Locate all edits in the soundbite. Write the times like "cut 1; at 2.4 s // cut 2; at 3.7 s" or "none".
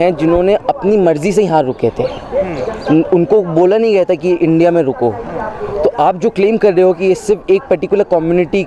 none